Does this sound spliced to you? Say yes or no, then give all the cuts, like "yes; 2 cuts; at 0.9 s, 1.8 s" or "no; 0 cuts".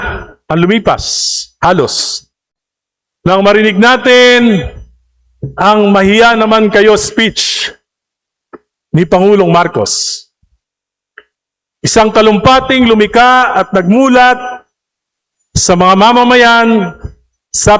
no; 0 cuts